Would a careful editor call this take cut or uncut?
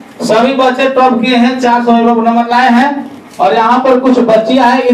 uncut